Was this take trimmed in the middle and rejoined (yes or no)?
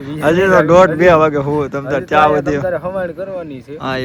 no